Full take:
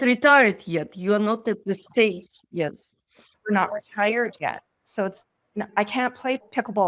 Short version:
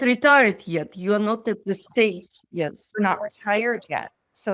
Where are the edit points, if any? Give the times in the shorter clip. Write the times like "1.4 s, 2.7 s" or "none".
2.8 s